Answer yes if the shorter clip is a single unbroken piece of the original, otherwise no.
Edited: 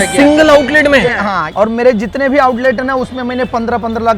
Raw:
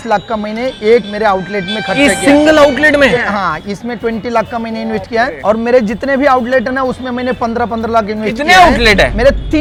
no